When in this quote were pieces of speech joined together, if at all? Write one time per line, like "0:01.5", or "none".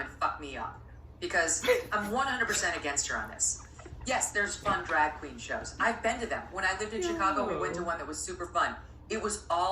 none